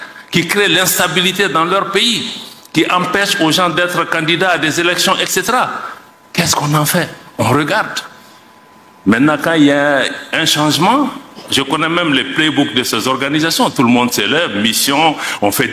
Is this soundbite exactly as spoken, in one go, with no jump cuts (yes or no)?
yes